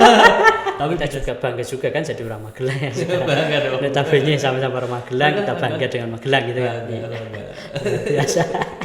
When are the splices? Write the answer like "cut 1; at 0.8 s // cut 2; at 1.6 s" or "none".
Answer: cut 1; at 1.0 s